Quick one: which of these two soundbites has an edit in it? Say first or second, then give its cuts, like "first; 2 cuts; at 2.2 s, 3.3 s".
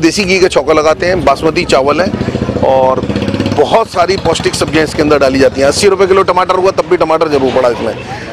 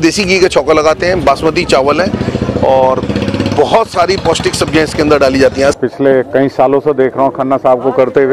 second; 1 cut; at 5.8 s